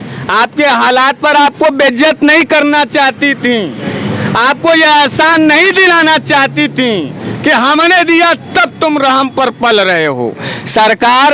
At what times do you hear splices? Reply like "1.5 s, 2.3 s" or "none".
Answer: none

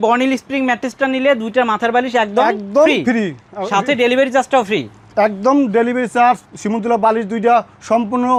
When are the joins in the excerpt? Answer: none

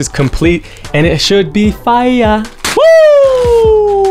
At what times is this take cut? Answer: 2.6 s

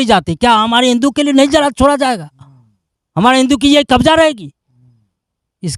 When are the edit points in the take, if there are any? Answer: none

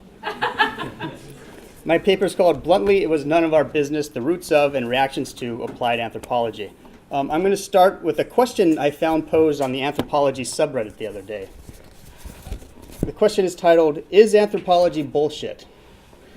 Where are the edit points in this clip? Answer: 9.5 s

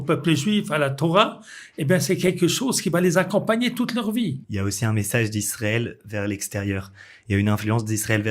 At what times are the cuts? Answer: 4.5 s

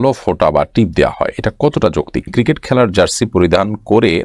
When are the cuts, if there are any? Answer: 2.3 s

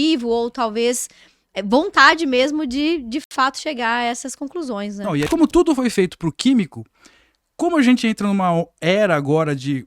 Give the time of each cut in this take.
5.3 s

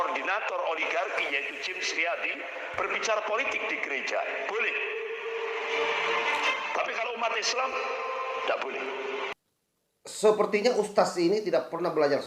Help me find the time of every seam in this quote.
9.3 s

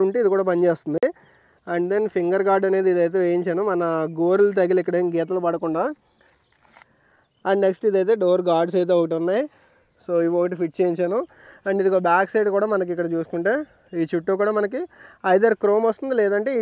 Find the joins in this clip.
none

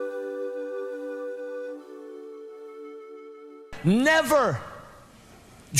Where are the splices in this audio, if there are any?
3.7 s

